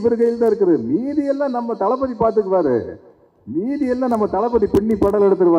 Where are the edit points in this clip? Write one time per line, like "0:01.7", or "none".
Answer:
none